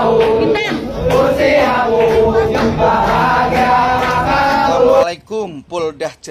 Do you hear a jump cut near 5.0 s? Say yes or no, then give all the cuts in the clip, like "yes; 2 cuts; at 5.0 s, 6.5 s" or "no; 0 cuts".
yes; 1 cut; at 5.0 s